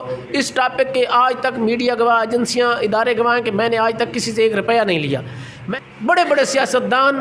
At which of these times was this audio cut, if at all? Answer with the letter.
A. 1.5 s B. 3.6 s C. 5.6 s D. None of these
C